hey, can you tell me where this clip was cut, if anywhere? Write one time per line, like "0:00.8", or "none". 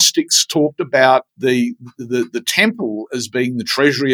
0:01.3